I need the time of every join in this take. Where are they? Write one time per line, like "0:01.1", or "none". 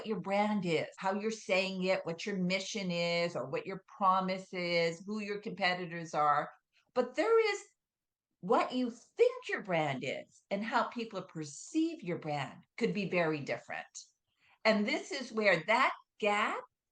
0:01.0